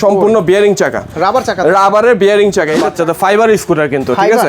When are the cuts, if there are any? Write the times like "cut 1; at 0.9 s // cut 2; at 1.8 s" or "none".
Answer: cut 1; at 2.9 s